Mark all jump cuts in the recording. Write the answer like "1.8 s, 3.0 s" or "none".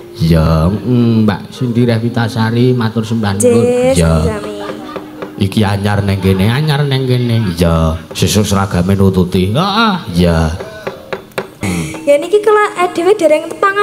11.7 s